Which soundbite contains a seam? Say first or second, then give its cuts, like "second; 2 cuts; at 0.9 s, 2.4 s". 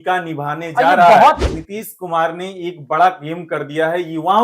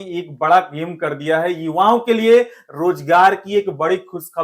first; 1 cut; at 1.4 s